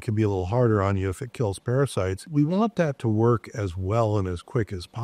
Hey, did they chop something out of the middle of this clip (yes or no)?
yes